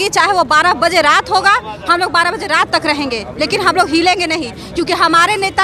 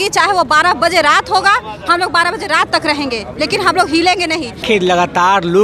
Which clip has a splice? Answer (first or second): second